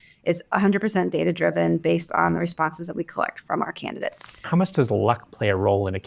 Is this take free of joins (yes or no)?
no